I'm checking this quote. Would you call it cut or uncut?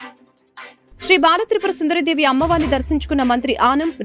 cut